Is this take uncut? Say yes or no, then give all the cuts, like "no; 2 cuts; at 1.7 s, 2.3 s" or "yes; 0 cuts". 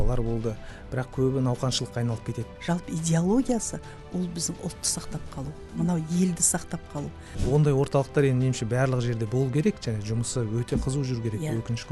no; 2 cuts; at 2.4 s, 7.3 s